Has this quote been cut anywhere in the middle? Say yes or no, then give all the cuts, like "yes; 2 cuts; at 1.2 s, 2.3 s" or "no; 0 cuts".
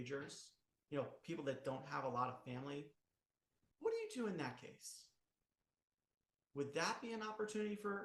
no; 0 cuts